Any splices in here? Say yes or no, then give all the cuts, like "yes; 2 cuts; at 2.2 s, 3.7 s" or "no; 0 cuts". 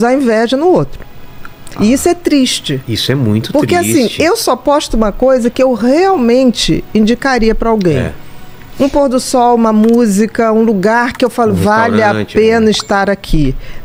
no; 0 cuts